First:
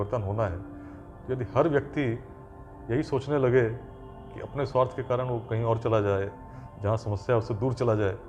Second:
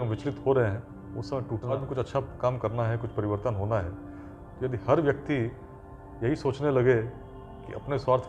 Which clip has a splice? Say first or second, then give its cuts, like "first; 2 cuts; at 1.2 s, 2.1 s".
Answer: second; 1 cut; at 1.7 s